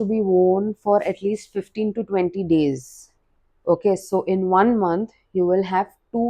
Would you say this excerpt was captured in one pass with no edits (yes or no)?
yes